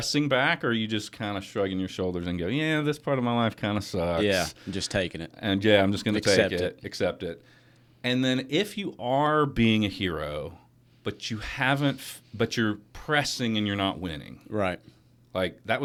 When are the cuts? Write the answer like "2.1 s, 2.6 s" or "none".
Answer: none